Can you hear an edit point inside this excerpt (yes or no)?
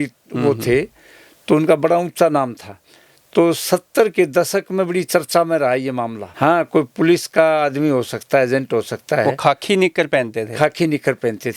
yes